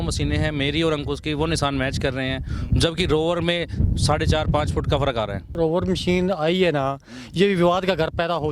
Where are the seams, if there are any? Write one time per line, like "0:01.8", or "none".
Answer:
0:05.5